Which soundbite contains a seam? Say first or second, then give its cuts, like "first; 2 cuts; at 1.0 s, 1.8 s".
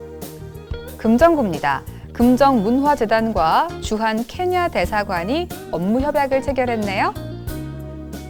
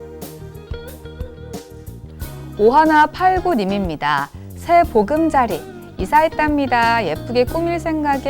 second; 2 cuts; at 0.9 s, 2.5 s